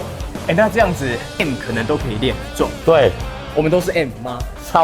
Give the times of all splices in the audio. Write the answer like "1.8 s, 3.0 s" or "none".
1.3 s

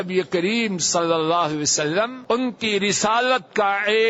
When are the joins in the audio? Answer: 2.2 s

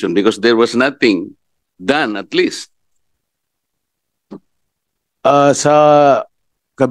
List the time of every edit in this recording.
none

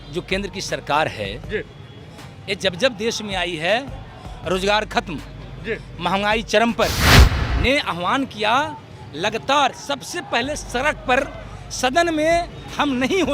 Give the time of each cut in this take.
7.1 s

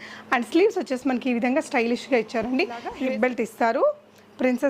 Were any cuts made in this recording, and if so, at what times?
2.9 s

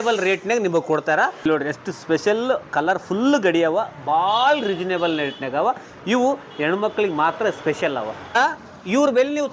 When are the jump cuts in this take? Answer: 1.4 s, 8.4 s

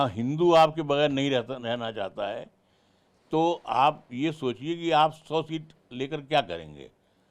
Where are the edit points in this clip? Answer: none

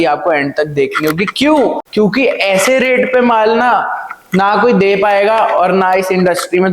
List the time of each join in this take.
1.8 s

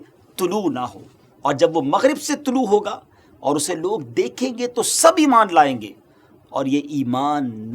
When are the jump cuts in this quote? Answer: none

